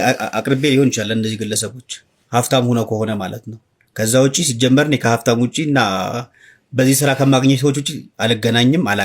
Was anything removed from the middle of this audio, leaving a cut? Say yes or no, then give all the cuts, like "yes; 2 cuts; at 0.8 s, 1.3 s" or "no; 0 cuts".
no; 0 cuts